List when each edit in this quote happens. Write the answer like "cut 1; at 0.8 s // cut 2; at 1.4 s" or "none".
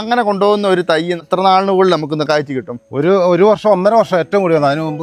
cut 1; at 1.3 s // cut 2; at 2.3 s